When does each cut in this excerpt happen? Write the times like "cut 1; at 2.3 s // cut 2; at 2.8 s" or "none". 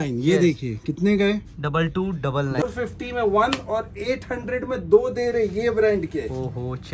cut 1; at 2.6 s